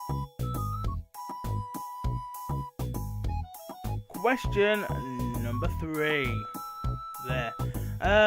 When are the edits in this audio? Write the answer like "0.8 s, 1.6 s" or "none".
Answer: 2.6 s